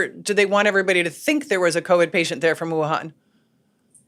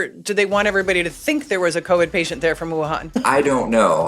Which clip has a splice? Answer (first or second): second